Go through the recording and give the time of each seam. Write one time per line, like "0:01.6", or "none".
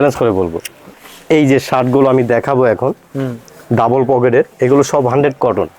0:01.0